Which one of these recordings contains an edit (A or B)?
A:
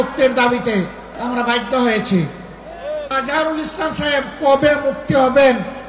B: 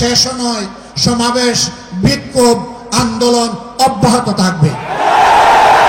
A